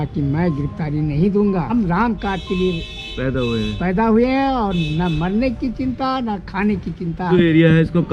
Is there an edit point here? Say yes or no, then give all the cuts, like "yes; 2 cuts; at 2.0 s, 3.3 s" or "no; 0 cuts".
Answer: yes; 2 cuts; at 1.7 s, 7.3 s